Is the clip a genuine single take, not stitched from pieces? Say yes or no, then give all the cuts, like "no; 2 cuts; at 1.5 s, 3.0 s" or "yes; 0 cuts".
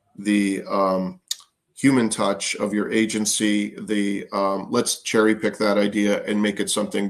yes; 0 cuts